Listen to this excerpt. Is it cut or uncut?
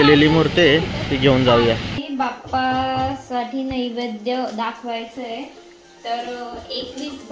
cut